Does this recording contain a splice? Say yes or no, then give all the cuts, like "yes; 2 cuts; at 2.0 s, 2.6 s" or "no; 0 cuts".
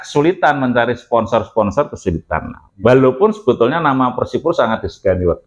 no; 0 cuts